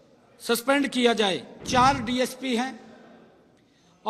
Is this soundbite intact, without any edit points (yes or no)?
no